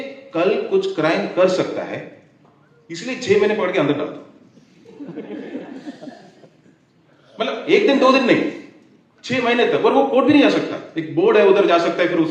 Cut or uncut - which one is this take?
uncut